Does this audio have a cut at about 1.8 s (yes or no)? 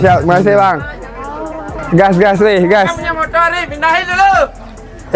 yes